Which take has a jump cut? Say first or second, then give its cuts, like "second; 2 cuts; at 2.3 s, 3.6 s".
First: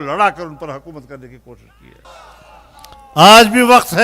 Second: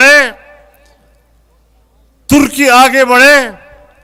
first; 1 cut; at 2.1 s